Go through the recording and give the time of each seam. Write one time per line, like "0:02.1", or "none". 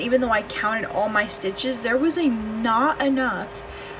none